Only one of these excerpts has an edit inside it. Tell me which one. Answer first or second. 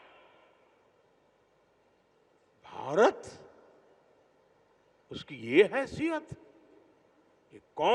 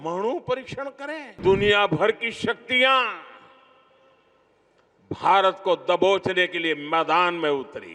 second